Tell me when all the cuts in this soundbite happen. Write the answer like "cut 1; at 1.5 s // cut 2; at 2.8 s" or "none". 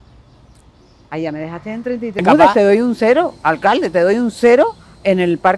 cut 1; at 2.2 s

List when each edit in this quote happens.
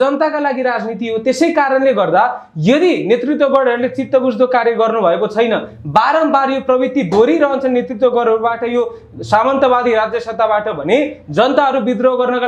none

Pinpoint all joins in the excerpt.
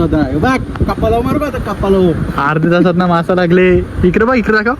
none

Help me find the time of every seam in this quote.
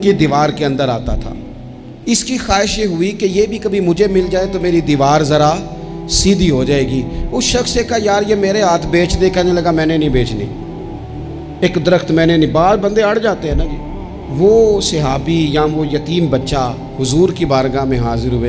none

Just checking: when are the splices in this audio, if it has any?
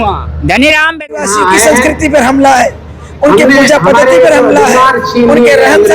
cut 1; at 1.2 s

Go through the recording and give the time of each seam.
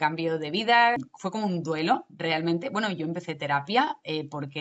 cut 1; at 1.1 s

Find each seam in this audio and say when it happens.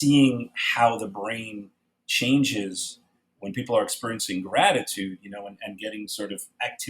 none

